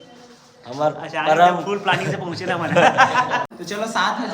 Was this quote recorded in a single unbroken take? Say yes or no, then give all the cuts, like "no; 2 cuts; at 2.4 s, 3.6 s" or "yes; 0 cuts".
no; 1 cut; at 3.4 s